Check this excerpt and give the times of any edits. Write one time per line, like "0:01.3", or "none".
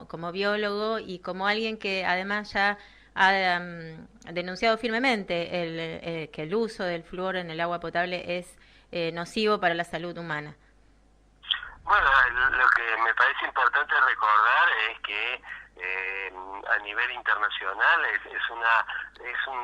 0:11.5

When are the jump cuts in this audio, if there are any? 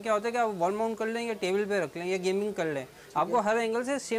none

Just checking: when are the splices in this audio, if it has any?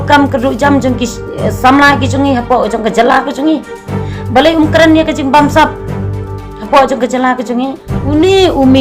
0:07.9

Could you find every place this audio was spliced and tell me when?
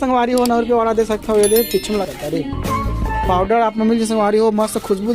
0:02.0

